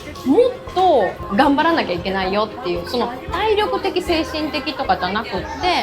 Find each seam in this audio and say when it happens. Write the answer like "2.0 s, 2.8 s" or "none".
1.2 s

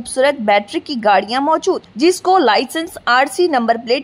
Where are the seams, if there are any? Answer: none

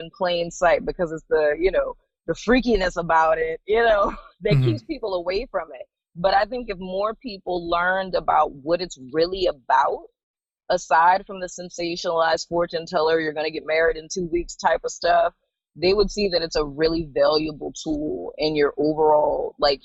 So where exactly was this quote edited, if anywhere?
none

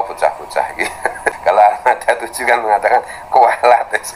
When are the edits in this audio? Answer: 1.4 s

